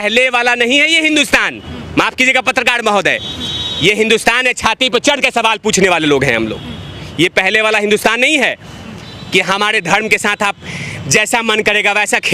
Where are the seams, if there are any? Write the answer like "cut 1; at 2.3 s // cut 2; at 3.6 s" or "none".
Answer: none